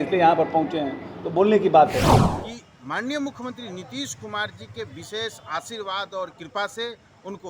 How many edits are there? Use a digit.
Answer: 1